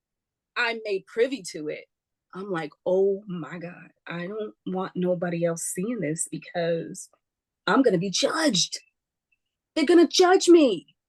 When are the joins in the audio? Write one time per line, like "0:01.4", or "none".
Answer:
none